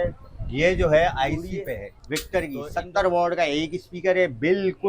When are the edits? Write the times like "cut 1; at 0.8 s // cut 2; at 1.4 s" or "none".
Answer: cut 1; at 1.9 s

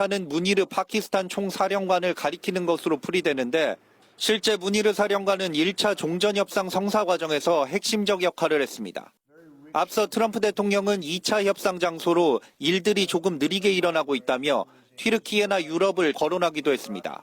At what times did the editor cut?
cut 1; at 16.2 s

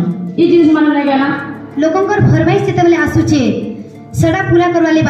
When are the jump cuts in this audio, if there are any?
cut 1; at 1.6 s

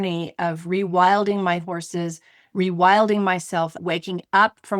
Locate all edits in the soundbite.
cut 1; at 3.8 s

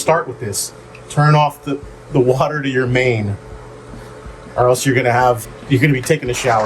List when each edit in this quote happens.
cut 1; at 5.5 s

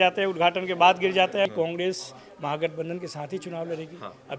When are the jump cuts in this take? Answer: cut 1; at 1.5 s

